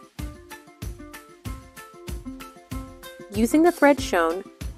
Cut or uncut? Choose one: uncut